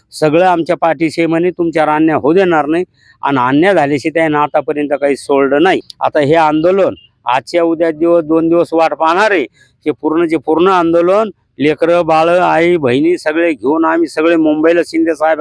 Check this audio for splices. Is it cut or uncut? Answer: cut